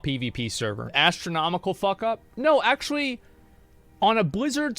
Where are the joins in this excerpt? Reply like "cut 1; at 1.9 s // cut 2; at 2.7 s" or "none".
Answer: cut 1; at 0.9 s